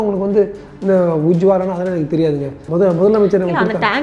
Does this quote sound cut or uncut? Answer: cut